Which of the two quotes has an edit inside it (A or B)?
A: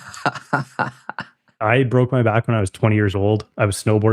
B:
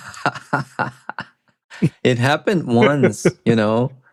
A